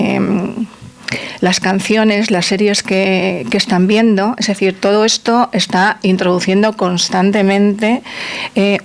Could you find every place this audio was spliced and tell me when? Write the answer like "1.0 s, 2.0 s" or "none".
none